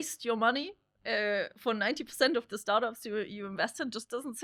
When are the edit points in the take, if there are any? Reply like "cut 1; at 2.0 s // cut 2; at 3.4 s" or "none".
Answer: none

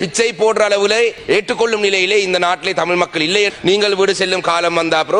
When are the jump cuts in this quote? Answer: cut 1; at 1.2 s // cut 2; at 3.5 s

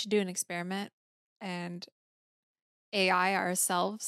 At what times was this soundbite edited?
none

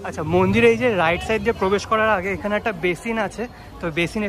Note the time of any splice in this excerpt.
none

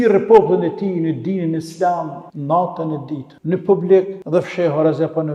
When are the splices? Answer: cut 1; at 2.3 s // cut 2; at 3.3 s // cut 3; at 4.2 s

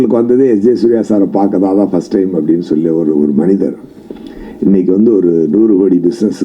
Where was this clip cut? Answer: none

